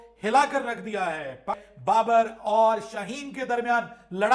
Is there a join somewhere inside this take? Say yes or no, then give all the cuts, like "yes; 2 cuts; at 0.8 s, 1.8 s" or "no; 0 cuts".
yes; 1 cut; at 1.7 s